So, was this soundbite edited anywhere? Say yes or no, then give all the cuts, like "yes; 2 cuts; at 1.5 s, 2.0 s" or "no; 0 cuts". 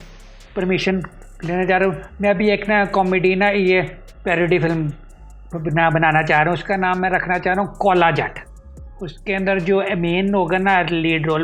no; 0 cuts